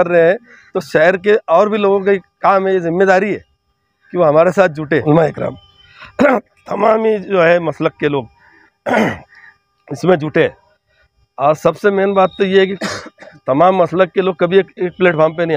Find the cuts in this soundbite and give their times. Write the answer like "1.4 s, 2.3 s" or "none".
5.0 s